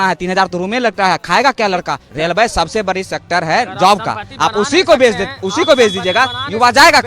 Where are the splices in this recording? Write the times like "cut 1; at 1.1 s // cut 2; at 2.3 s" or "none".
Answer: cut 1; at 2.0 s